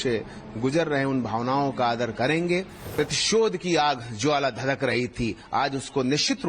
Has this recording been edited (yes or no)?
yes